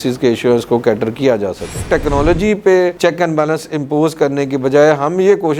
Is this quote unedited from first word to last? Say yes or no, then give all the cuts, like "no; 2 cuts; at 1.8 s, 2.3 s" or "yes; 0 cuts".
no; 1 cut; at 1.9 s